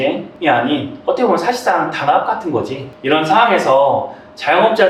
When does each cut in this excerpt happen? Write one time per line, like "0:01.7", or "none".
none